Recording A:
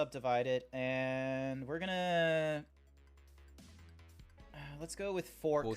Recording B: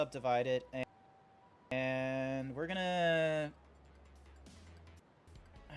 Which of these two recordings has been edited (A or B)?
A